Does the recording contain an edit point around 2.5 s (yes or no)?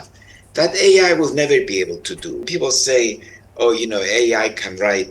yes